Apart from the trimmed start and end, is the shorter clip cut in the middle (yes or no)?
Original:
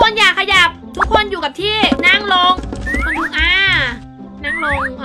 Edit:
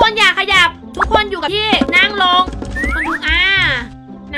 yes